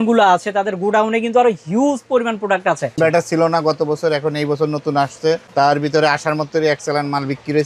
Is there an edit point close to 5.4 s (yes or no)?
yes